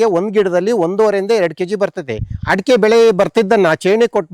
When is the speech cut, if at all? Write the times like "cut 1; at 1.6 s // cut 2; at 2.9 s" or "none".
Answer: cut 1; at 2.3 s